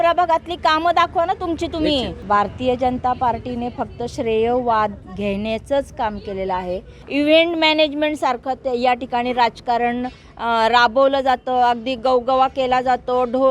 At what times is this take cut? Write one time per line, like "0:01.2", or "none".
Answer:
0:02.1
0:05.1
0:07.0